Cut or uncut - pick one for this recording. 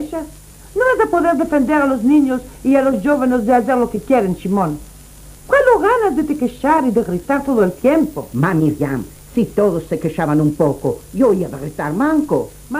cut